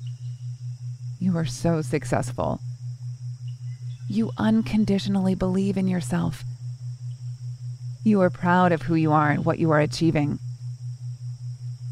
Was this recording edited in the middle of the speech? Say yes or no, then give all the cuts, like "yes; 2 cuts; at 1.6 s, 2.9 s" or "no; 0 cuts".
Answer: no; 0 cuts